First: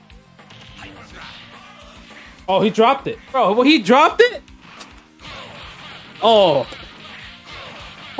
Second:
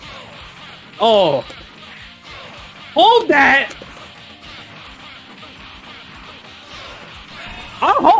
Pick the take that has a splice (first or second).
first